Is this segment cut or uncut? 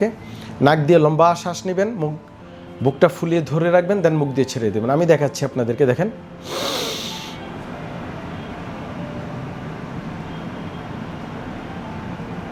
uncut